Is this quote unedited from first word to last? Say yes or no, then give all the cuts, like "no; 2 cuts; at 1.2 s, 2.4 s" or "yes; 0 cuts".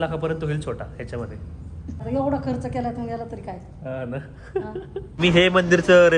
no; 2 cuts; at 2.0 s, 5.1 s